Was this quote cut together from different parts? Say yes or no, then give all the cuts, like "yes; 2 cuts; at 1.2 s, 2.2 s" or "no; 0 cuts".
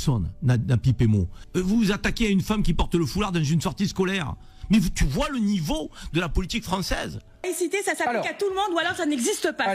yes; 2 cuts; at 1.4 s, 7.4 s